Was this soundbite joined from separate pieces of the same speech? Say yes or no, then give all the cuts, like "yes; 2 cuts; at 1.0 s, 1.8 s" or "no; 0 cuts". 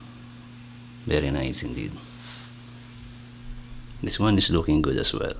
yes; 1 cut; at 4.0 s